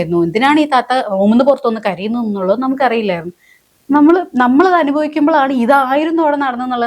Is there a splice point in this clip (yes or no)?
no